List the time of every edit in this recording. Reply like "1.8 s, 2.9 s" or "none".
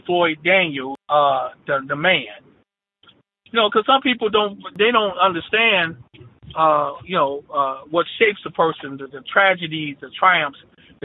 1.0 s, 2.7 s